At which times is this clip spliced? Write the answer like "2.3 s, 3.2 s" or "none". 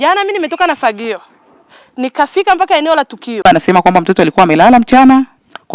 3.4 s